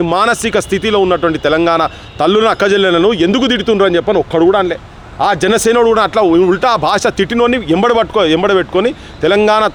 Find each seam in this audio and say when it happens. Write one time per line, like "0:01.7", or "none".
none